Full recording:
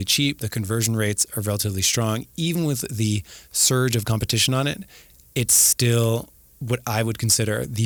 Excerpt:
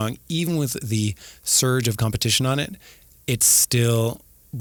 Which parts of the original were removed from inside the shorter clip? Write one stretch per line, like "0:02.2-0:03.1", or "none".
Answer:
none